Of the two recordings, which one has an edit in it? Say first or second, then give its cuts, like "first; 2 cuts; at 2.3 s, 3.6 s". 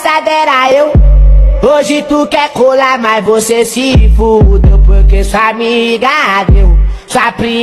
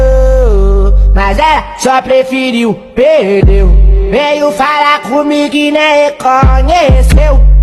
first; 1 cut; at 6.4 s